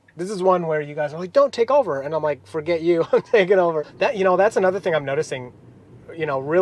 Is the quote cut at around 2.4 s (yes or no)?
no